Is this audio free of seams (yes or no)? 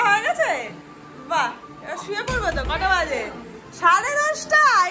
yes